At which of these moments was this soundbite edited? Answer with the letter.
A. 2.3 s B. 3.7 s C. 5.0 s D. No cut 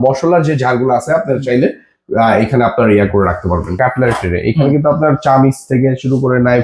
B